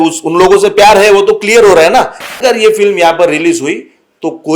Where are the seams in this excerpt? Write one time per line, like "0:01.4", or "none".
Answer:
0:02.2